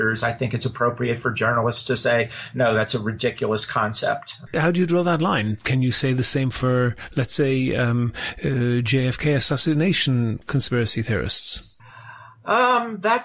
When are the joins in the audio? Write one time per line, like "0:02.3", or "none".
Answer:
0:04.3